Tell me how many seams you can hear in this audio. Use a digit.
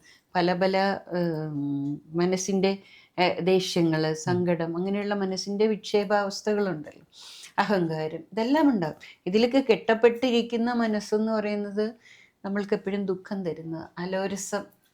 0